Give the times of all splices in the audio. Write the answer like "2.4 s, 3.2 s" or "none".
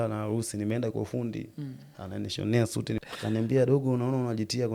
3.0 s

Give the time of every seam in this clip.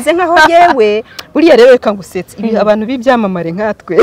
1.1 s

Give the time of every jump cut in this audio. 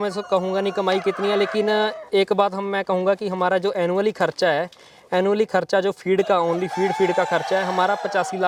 none

